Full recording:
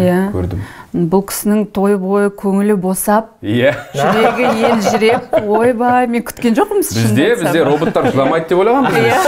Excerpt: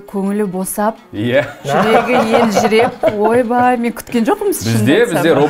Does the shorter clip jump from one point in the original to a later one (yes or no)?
no